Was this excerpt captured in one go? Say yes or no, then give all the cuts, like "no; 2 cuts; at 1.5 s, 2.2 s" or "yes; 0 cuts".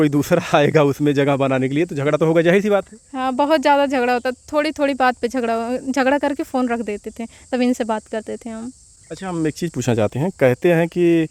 yes; 0 cuts